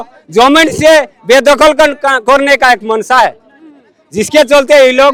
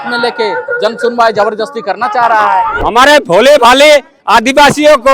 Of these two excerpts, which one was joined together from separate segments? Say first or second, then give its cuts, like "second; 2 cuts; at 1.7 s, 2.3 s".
second; 1 cut; at 2.7 s